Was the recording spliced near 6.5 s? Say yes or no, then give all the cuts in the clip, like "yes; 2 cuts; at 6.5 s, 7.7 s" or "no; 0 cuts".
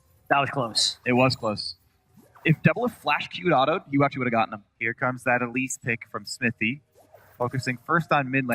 no; 1 cut; at 2.8 s